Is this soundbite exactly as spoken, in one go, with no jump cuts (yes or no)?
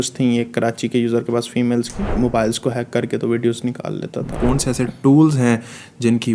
no